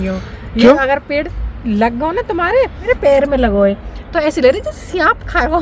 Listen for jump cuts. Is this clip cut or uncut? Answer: cut